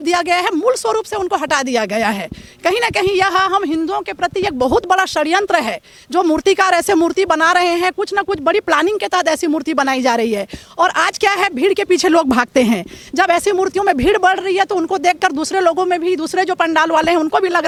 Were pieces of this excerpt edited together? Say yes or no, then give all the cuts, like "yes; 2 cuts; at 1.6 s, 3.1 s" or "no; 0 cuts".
no; 0 cuts